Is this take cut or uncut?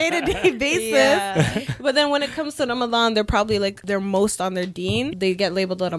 cut